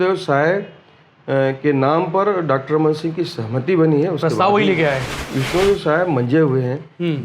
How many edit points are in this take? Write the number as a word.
one